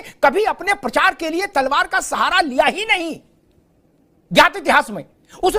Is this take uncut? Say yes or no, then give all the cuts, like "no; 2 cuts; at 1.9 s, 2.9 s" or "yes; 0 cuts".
yes; 0 cuts